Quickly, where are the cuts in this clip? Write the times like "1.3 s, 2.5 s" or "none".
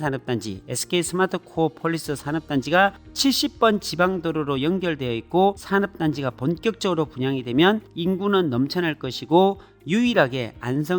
5.6 s